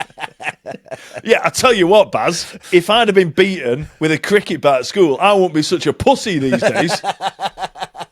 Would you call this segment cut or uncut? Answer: cut